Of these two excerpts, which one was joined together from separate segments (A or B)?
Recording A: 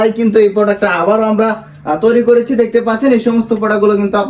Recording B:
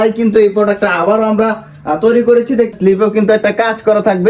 B